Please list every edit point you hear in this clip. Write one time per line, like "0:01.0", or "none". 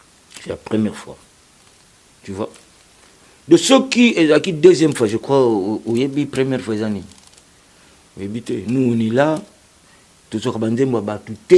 none